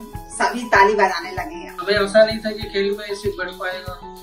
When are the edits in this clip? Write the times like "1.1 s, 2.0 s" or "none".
1.8 s